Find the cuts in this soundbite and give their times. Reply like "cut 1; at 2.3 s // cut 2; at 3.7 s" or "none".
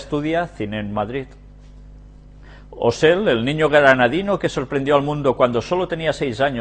cut 1; at 1.6 s